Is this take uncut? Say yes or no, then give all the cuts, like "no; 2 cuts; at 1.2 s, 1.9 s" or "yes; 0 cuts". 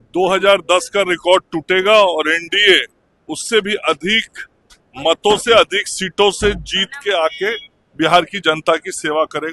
yes; 0 cuts